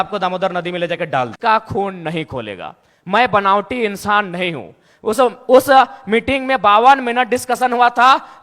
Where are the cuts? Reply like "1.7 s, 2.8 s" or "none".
1.3 s